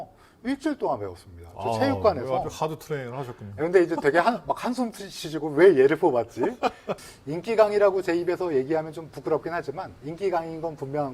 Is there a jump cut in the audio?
yes; 1 cut; at 6.9 s

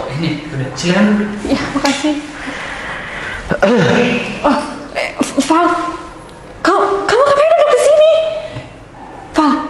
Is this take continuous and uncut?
yes; 0 cuts

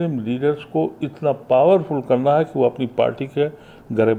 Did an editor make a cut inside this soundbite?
no; 0 cuts

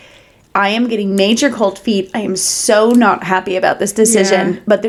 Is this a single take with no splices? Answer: yes; 0 cuts

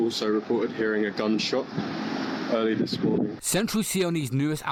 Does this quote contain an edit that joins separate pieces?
no; 0 cuts

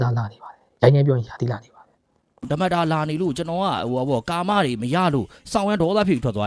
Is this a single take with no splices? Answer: no; 1 cut; at 2.5 s

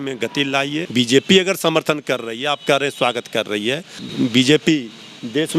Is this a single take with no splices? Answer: no; 2 cuts; at 0.9 s, 4.0 s

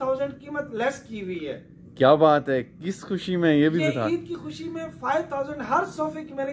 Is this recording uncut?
yes; 0 cuts

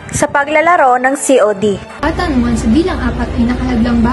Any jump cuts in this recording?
yes; 1 cut; at 1.9 s

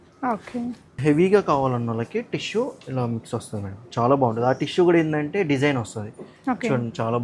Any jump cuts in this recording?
yes; 1 cut; at 0.9 s

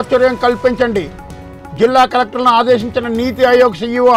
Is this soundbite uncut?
yes; 0 cuts

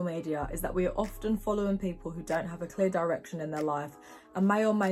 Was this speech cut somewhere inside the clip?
no; 0 cuts

